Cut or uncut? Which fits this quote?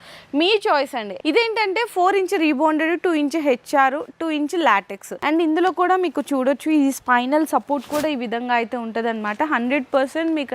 cut